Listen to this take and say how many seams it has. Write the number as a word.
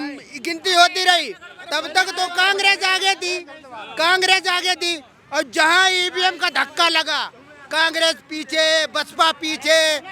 zero